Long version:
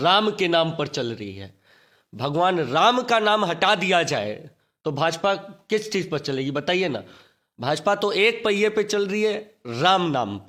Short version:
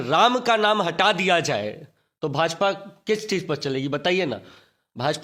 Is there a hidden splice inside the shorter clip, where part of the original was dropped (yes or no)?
no